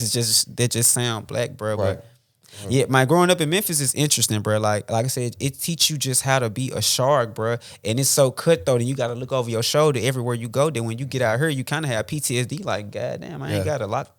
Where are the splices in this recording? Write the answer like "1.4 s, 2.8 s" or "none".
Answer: none